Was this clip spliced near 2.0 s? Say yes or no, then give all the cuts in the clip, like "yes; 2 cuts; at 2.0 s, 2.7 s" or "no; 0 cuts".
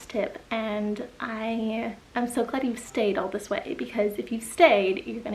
yes; 1 cut; at 2.0 s